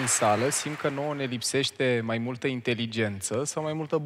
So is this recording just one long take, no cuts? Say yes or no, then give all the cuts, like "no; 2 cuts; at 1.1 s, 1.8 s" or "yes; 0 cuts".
yes; 0 cuts